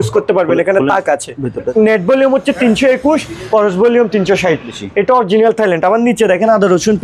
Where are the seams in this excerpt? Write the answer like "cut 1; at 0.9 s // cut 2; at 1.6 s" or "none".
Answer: cut 1; at 1.7 s // cut 2; at 4.8 s